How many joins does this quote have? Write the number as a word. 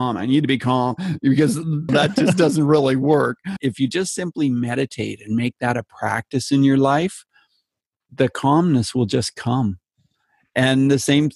two